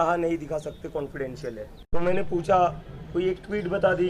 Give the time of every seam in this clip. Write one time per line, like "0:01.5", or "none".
0:01.8